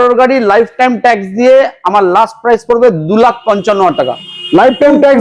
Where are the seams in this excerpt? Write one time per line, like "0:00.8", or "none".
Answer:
none